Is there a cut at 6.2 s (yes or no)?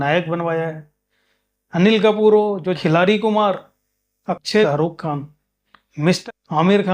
yes